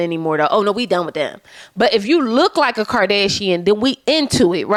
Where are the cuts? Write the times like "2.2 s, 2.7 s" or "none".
none